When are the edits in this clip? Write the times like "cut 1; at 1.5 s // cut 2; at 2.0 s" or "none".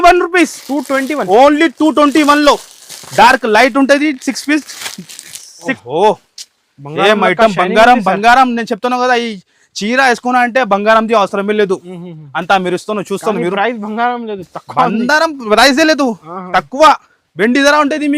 cut 1; at 5.8 s